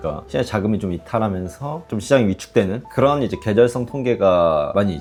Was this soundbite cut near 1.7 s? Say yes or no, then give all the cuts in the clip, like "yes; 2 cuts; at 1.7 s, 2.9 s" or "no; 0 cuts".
no; 0 cuts